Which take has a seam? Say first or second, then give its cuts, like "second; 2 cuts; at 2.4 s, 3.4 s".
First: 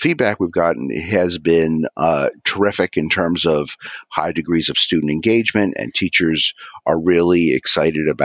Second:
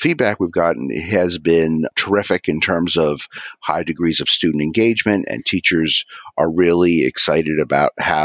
second; 1 cut; at 1.9 s